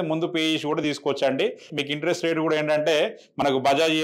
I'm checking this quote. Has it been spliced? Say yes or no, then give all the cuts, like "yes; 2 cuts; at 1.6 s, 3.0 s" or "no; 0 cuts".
yes; 1 cut; at 1.7 s